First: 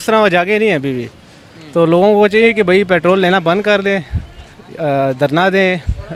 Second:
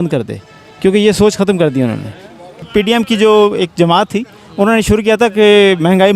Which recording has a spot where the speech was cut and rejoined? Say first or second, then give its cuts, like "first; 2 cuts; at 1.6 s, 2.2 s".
second; 1 cut; at 2.7 s